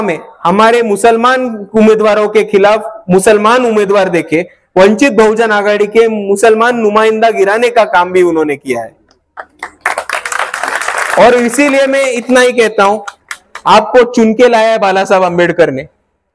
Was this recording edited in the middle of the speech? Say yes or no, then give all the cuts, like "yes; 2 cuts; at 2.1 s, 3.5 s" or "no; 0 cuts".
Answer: no; 0 cuts